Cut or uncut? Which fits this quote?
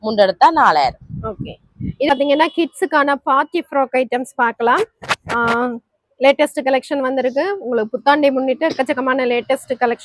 cut